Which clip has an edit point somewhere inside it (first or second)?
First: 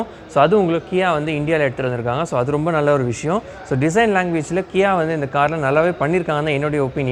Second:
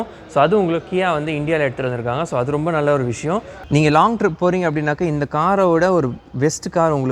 second